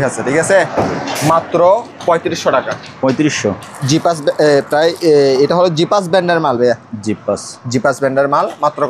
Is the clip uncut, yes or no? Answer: yes